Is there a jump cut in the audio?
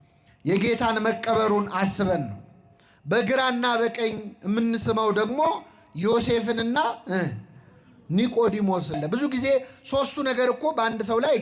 yes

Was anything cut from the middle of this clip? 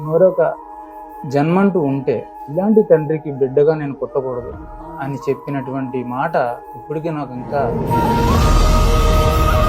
yes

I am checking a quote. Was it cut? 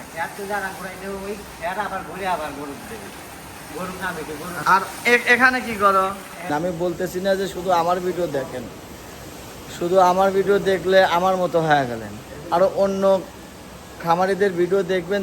yes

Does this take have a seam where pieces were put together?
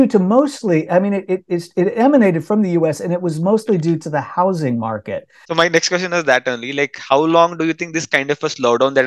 yes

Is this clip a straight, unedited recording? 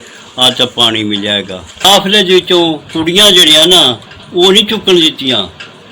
no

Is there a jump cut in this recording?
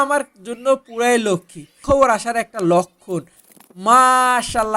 yes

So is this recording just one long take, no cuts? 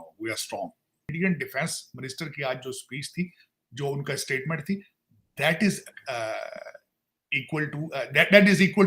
no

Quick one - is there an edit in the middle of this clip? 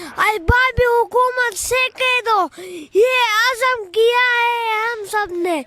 no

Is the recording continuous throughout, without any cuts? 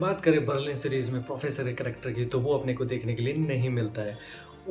yes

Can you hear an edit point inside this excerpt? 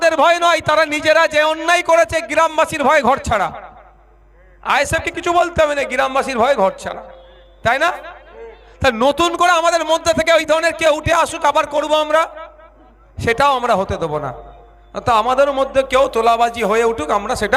no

